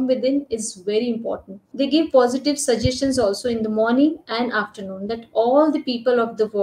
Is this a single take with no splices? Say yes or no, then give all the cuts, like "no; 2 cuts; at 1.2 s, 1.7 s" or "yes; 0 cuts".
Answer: no; 1 cut; at 1.6 s